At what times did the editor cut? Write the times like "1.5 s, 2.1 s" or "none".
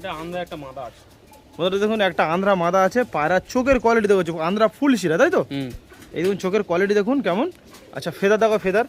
none